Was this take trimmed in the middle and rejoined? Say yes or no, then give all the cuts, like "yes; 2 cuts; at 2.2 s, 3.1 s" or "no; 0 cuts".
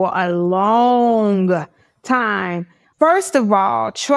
yes; 1 cut; at 2.8 s